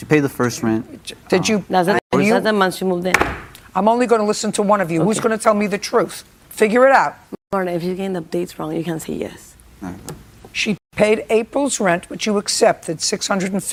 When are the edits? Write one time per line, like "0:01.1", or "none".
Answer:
none